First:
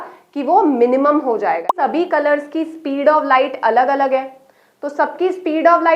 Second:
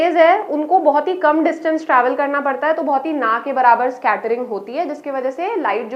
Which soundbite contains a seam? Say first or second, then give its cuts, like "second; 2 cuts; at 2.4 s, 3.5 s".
first; 1 cut; at 1.7 s